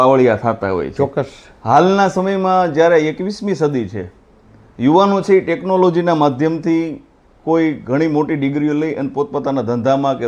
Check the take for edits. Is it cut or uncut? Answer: cut